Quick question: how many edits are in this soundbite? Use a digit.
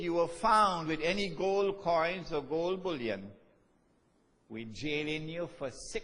1